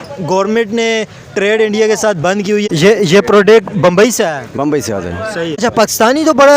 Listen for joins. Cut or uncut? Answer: cut